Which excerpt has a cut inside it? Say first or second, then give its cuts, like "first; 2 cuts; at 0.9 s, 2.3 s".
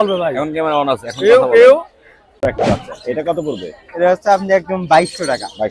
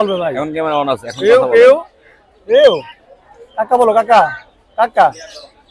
first; 1 cut; at 2.4 s